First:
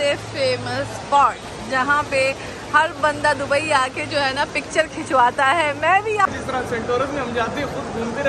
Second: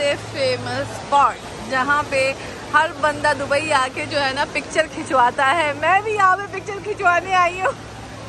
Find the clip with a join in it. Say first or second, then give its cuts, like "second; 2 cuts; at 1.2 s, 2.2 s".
first; 1 cut; at 6.3 s